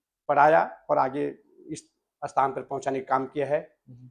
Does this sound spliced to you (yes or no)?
no